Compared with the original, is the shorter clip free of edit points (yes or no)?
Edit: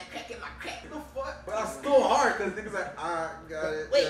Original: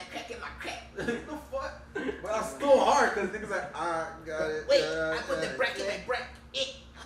no